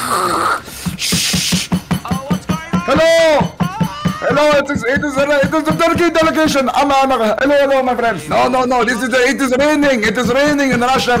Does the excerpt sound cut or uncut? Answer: uncut